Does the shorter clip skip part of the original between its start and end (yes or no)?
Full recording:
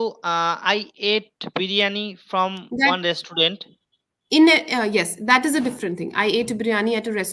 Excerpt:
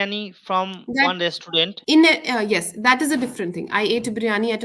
yes